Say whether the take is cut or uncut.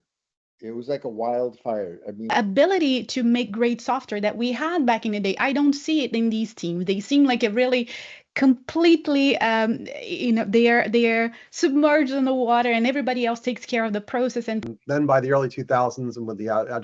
cut